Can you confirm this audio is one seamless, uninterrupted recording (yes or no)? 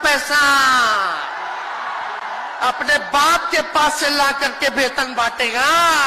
yes